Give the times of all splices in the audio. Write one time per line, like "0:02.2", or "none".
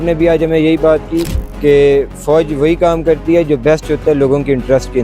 none